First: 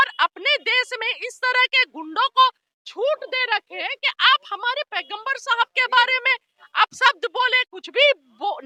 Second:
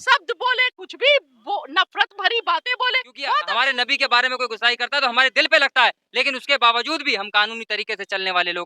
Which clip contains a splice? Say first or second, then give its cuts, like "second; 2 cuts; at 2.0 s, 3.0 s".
second; 1 cut; at 3.4 s